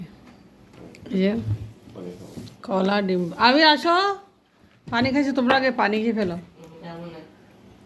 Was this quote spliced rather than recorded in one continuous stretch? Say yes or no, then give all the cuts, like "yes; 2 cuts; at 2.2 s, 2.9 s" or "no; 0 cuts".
no; 0 cuts